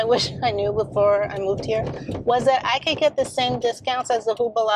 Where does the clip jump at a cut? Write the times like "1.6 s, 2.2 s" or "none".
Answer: none